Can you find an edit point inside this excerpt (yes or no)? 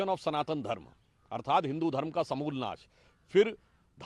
no